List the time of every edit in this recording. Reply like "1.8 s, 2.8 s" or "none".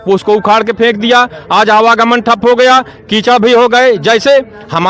none